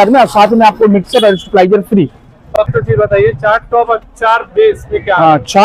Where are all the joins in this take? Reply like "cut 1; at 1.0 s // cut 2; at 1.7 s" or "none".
cut 1; at 2.7 s